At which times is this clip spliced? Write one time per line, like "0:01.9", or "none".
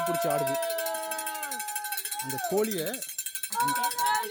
none